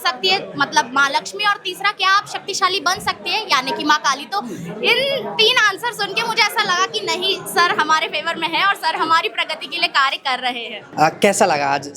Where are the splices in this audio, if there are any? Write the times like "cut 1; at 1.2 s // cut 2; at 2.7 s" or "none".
cut 1; at 10.8 s